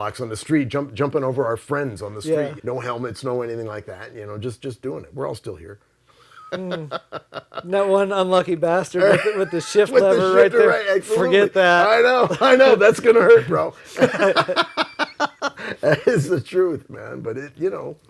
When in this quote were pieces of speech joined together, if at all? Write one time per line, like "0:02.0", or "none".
0:02.6
0:16.9